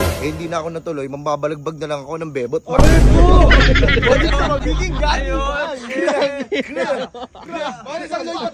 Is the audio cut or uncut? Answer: uncut